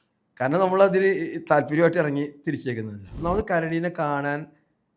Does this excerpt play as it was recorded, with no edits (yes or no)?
no